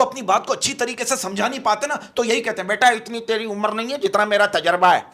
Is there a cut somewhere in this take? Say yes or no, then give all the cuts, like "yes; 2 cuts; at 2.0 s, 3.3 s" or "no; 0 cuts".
no; 0 cuts